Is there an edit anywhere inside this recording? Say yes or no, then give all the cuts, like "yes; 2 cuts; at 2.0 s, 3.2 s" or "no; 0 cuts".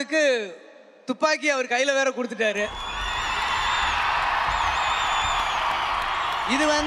no; 0 cuts